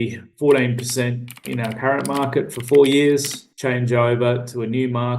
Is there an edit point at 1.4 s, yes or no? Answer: yes